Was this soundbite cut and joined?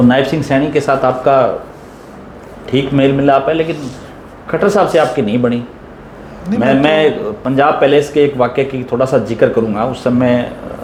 no; 0 cuts

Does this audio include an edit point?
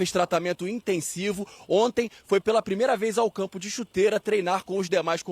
no; 0 cuts

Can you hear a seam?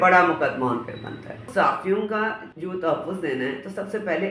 yes; 2 cuts; at 1.5 s, 2.5 s

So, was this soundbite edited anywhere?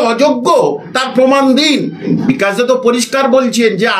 yes; 1 cut; at 2.1 s

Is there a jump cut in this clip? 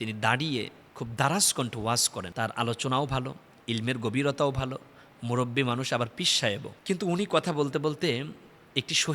yes; 1 cut; at 2.2 s

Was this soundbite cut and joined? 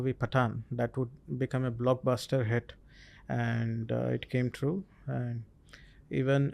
no; 0 cuts

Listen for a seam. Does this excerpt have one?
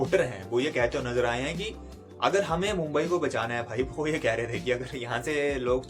no; 0 cuts

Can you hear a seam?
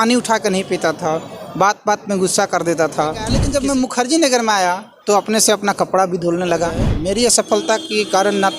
yes; 2 cuts; at 3.3 s, 6.9 s

